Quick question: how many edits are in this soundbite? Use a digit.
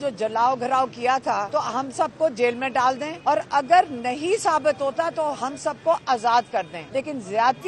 3